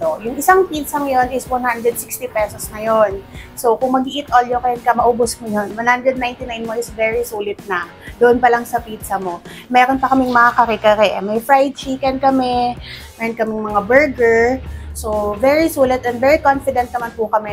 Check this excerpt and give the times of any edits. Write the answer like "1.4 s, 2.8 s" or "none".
none